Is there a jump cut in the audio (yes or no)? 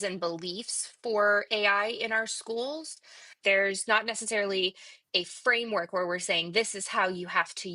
yes